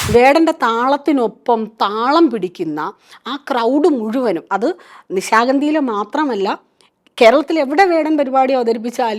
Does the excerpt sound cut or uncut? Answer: uncut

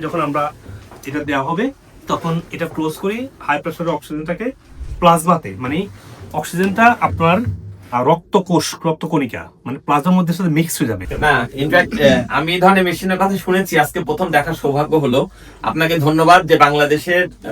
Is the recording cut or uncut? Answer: cut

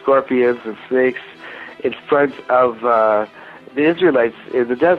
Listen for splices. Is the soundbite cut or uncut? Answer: uncut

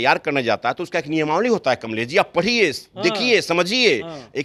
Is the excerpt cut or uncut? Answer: uncut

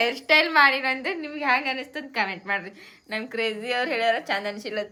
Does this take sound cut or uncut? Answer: uncut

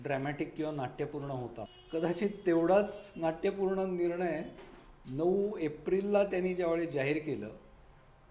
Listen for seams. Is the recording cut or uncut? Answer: cut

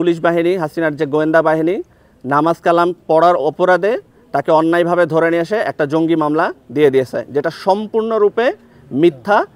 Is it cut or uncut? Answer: uncut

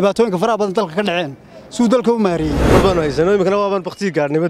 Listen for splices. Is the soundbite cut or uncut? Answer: cut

